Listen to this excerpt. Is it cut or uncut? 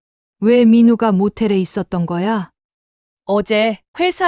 cut